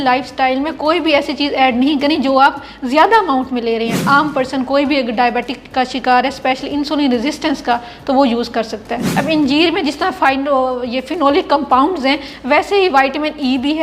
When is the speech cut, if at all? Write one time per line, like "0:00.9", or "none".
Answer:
0:04.0
0:09.1